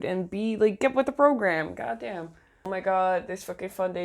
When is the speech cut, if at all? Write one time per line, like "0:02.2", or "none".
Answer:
0:02.5